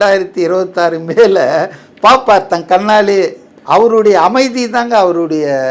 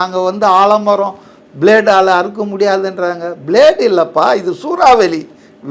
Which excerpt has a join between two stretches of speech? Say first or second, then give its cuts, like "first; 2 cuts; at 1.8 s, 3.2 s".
first; 1 cut; at 3.4 s